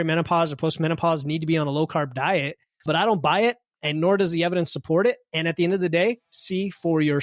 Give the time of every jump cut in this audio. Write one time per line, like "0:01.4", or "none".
0:02.8